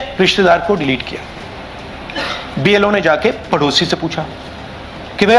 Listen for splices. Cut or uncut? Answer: uncut